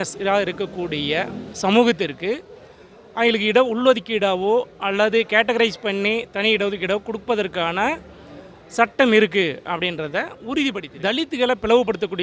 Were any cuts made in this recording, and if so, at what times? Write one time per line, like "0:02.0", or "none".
0:10.9